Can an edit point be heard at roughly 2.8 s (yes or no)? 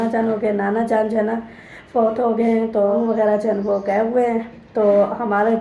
yes